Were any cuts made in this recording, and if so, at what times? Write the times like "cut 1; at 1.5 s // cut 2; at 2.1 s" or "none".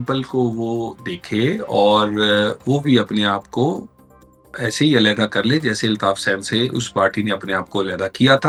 none